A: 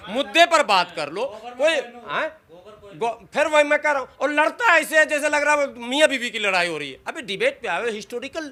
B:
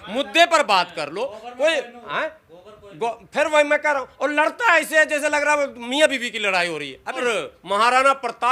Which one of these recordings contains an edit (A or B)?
B